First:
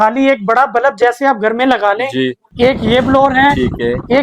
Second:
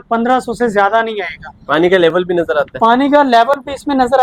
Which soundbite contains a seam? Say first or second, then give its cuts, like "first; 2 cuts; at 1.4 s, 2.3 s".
first; 1 cut; at 2.4 s